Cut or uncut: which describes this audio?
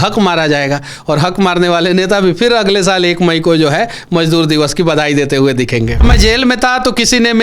cut